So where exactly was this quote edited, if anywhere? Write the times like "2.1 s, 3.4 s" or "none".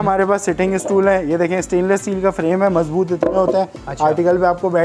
none